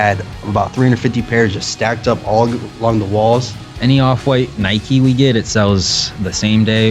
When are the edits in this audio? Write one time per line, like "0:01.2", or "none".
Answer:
0:03.7